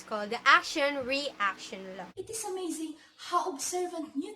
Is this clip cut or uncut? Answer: cut